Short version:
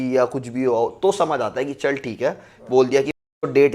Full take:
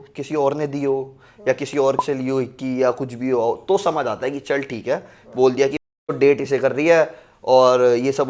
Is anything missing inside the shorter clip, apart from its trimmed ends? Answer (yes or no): no